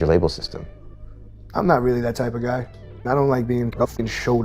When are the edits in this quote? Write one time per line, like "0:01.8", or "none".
0:03.0